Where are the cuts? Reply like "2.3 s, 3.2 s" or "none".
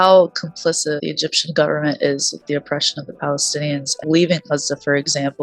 1.0 s, 4.0 s